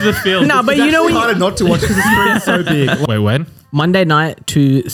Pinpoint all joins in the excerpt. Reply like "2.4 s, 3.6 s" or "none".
3.0 s